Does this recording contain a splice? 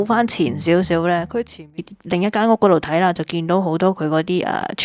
yes; 1 cut; at 1.8 s

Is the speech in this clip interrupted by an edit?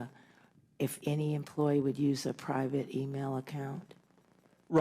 yes; 1 cut; at 2.1 s

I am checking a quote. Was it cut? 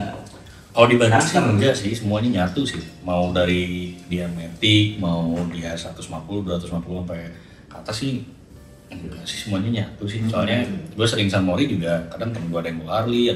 no; 0 cuts

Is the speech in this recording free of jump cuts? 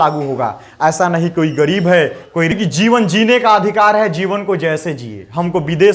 no; 1 cut; at 2.5 s

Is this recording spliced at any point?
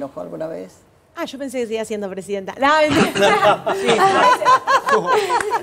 no; 0 cuts

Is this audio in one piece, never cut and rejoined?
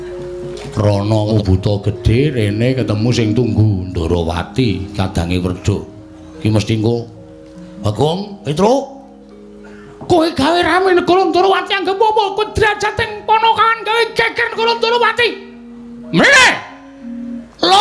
no; 1 cut; at 1.3 s

